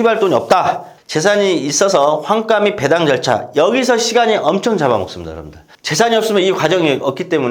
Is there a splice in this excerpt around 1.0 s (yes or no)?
yes